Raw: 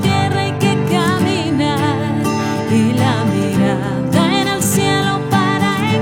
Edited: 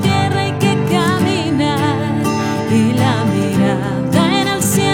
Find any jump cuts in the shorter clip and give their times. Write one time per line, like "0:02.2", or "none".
none